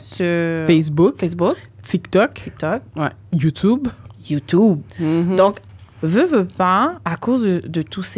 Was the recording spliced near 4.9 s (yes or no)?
yes